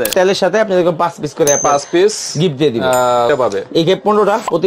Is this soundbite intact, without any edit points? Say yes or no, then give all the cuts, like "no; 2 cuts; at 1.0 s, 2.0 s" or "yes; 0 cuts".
no; 1 cut; at 3.3 s